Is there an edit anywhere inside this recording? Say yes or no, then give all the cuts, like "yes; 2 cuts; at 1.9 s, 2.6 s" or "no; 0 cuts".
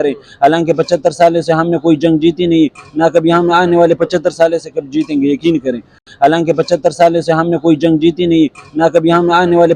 yes; 1 cut; at 6.0 s